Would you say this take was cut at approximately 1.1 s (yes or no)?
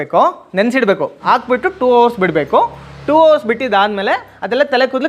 yes